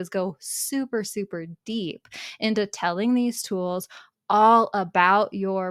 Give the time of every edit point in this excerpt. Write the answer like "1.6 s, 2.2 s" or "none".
none